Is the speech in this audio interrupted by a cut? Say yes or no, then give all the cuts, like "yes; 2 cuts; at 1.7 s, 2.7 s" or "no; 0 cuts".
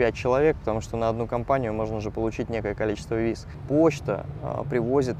yes; 1 cut; at 3.6 s